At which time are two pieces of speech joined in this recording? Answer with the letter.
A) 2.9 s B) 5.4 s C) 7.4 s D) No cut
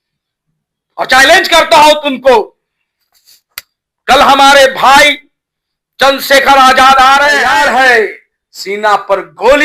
C